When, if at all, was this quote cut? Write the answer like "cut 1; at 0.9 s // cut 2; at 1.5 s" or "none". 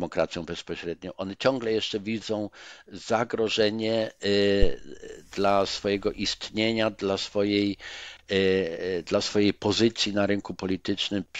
none